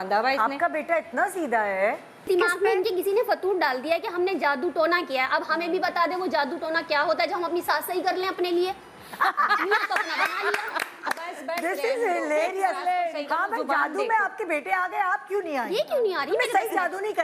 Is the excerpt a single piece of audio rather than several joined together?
no; 1 cut; at 2.3 s

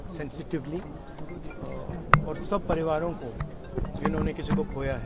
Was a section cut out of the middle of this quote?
no; 0 cuts

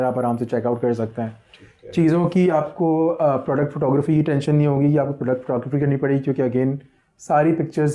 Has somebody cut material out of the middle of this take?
no; 0 cuts

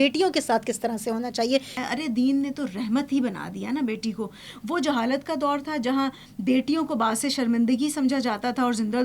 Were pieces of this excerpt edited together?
yes; 1 cut; at 1.7 s

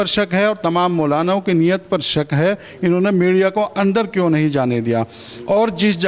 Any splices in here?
no; 0 cuts

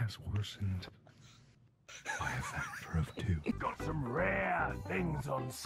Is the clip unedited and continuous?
no; 1 cut; at 3.5 s

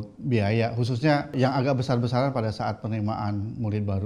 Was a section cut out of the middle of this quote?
yes; 1 cut; at 1.3 s

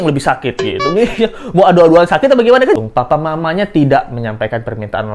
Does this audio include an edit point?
yes; 1 cut; at 2.8 s

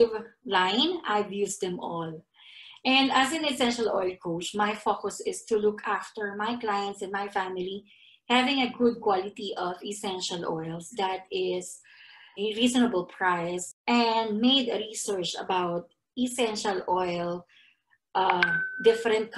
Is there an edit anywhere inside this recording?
yes; 2 cuts; at 12.3 s, 13.6 s

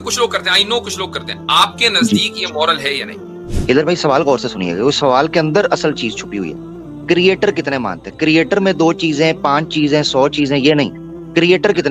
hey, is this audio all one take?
no; 1 cut; at 3.5 s

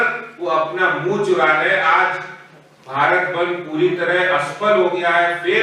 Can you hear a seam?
no; 0 cuts

